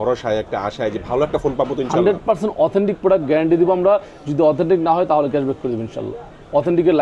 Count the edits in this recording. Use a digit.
0